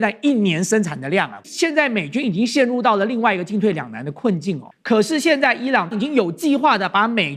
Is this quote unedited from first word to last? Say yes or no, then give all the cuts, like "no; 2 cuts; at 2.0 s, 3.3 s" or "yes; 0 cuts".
no; 3 cuts; at 1.4 s, 4.7 s, 5.9 s